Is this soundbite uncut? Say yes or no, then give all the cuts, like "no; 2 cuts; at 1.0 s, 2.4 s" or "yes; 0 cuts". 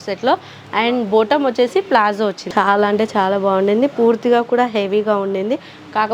no; 1 cut; at 2.4 s